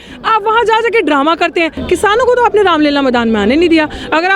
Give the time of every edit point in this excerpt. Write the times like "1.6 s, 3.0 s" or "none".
1.8 s